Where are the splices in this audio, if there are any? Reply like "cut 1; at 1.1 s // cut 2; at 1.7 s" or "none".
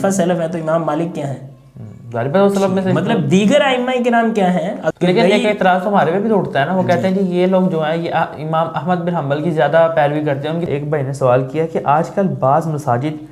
cut 1; at 4.9 s // cut 2; at 10.7 s